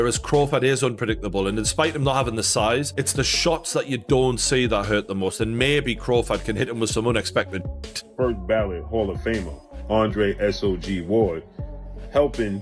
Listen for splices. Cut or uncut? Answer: cut